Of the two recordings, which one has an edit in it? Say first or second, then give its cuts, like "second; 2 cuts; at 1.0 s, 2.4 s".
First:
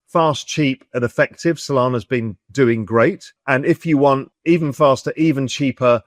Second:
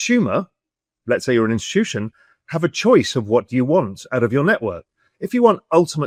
first; 3 cuts; at 2.4 s, 3.3 s, 4.3 s